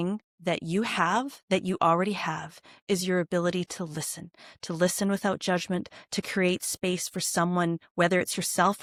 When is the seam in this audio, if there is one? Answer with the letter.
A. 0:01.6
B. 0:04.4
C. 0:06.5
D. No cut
D